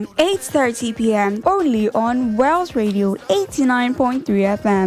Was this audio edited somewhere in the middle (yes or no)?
no